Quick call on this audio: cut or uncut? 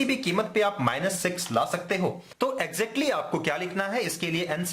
cut